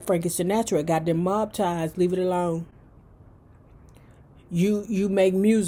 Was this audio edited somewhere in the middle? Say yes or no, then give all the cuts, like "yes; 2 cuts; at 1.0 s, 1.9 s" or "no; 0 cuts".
no; 0 cuts